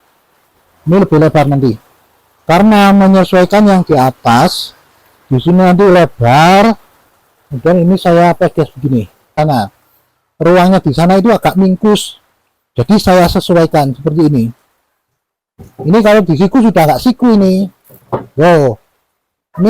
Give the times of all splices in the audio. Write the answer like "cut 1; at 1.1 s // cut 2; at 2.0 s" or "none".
cut 1; at 9.4 s